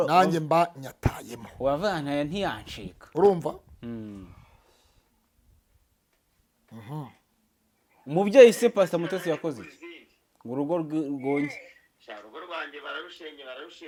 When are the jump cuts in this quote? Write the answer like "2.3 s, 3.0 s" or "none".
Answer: none

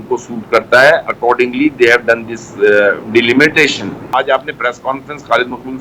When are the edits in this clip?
4.1 s

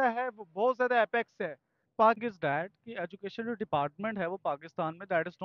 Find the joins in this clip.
2.2 s

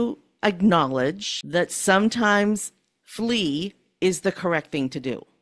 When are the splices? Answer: 1.3 s

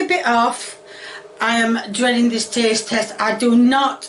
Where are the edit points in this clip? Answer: none

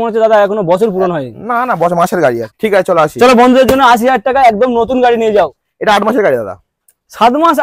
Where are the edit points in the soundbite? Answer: 2.4 s, 5.6 s

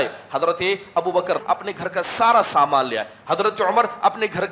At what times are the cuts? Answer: 1.4 s

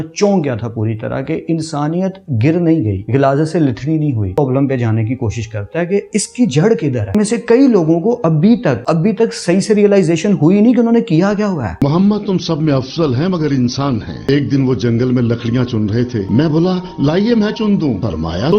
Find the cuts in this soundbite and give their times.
3.0 s, 4.4 s, 7.1 s, 8.8 s, 11.8 s

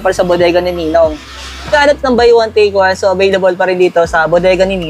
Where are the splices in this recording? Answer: 1.7 s

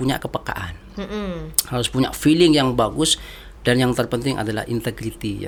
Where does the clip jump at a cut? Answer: none

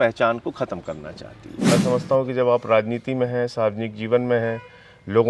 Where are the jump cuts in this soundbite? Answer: 1.7 s

